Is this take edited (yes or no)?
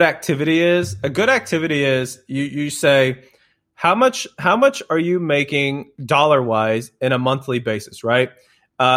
no